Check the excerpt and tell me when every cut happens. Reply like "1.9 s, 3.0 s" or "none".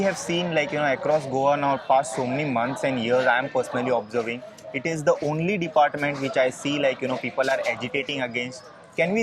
none